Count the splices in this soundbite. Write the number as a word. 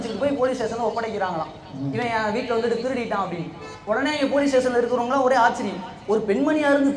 zero